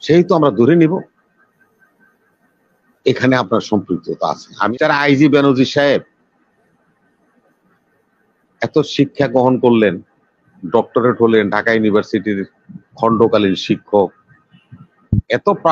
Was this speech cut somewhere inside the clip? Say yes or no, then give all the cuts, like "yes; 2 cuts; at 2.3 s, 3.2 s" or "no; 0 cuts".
yes; 1 cut; at 4.7 s